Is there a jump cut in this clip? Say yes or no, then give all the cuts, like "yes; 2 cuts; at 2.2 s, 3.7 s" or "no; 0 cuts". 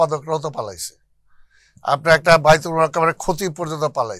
no; 0 cuts